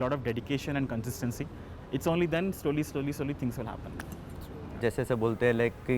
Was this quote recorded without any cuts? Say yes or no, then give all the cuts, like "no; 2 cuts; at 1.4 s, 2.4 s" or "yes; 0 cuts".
no; 1 cut; at 4.8 s